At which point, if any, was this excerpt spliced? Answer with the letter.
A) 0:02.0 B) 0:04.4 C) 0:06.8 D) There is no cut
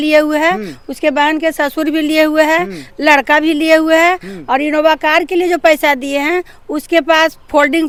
D